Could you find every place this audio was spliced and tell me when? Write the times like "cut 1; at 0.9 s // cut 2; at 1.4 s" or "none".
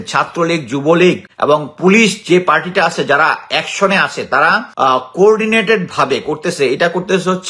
cut 1; at 1.3 s // cut 2; at 4.7 s